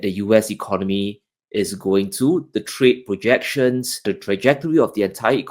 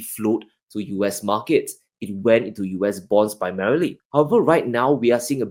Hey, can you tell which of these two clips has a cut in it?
first; 1 cut; at 4.0 s

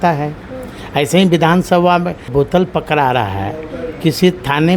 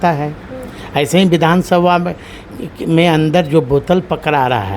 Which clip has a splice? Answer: first; 1 cut; at 2.3 s

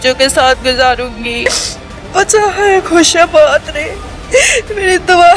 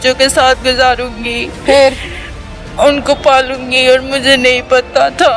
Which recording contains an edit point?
first; 1 cut; at 1.5 s

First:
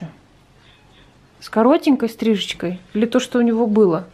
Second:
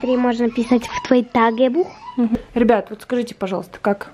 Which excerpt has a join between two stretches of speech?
second; 1 cut; at 2.3 s

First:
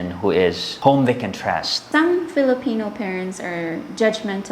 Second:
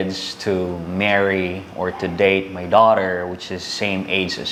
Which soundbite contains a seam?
first; 1 cut; at 1.8 s

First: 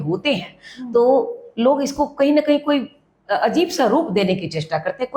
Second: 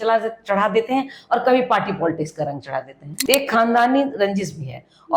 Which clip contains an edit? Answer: second; 1 cut; at 3.2 s

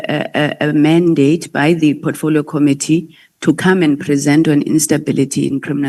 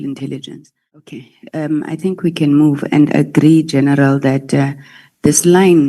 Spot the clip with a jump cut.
second; 1 cut; at 1.1 s

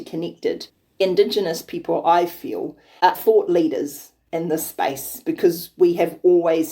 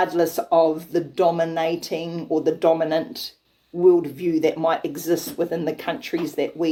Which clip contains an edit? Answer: first; 2 cuts; at 1.0 s, 3.1 s

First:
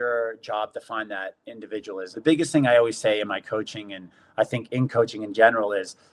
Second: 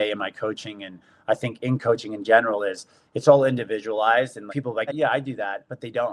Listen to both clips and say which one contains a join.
second; 1 cut; at 4.9 s

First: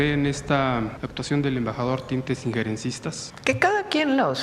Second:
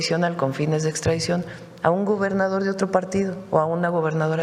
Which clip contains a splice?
first; 2 cuts; at 1.0 s, 3.3 s

